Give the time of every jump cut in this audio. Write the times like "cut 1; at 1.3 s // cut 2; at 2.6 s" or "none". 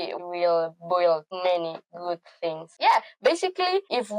cut 1; at 2.6 s